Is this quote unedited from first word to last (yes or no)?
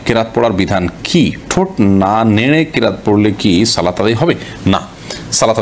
yes